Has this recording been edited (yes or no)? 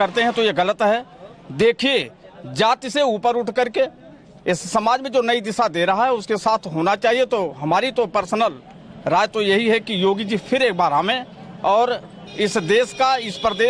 no